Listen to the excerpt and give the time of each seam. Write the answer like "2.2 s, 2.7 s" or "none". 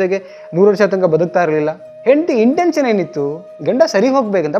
1.8 s